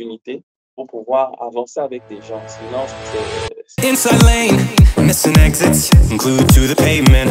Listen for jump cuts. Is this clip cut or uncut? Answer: cut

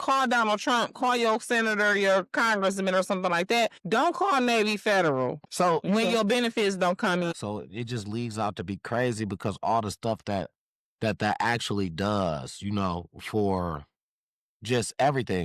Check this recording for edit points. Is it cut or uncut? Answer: cut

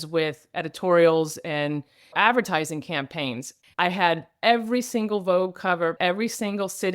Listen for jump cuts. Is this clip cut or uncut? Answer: cut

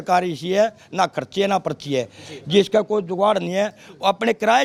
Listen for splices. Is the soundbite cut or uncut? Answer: uncut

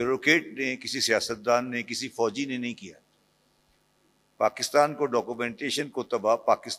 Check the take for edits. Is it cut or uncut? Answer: uncut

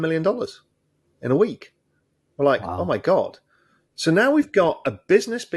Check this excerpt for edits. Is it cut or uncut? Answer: uncut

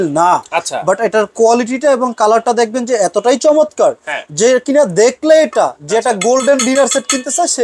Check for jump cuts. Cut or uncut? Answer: uncut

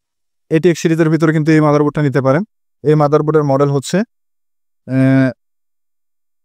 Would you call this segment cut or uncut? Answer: uncut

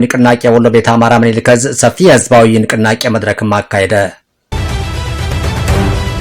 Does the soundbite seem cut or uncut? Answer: cut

